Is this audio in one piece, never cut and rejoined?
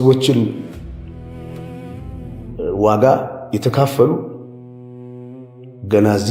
yes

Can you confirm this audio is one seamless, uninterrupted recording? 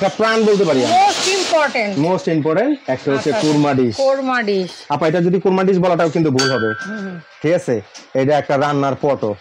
yes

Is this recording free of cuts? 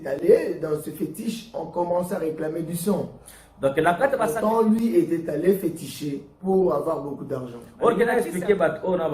no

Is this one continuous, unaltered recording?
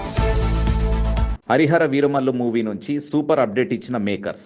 no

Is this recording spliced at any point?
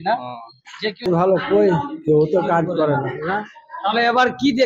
yes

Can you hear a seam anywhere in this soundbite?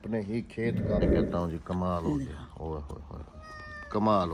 yes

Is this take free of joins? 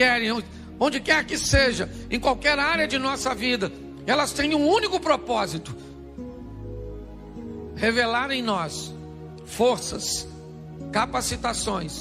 no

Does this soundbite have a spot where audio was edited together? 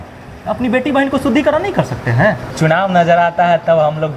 yes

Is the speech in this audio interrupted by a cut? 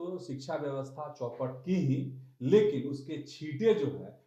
no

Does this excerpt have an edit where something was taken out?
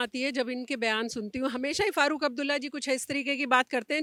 no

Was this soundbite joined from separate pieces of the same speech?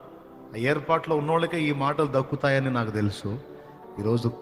no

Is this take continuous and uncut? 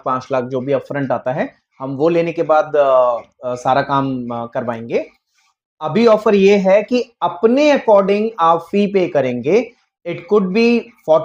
yes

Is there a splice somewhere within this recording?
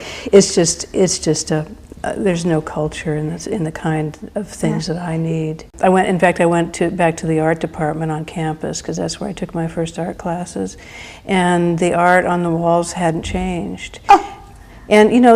yes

